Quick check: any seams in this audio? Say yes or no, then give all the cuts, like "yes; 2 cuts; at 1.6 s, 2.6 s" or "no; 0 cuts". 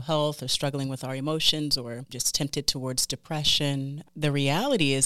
yes; 2 cuts; at 2.2 s, 4.0 s